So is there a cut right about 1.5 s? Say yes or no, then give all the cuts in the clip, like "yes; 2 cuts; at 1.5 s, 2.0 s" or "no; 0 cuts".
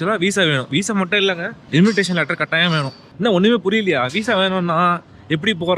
yes; 2 cuts; at 1.5 s, 3.0 s